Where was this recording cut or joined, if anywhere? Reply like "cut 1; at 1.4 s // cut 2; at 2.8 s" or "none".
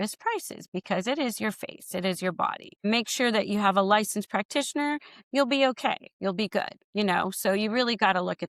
cut 1; at 2.8 s